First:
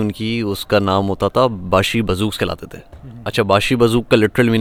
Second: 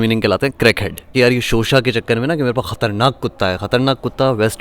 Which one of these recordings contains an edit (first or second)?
second